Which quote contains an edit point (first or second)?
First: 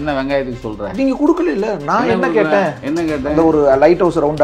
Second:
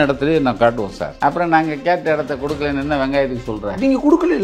second